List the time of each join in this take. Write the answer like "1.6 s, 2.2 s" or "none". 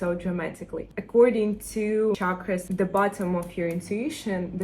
0.9 s, 2.4 s